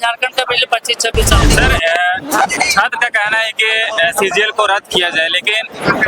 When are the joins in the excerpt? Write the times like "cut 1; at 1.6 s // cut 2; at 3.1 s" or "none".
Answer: cut 1; at 1.5 s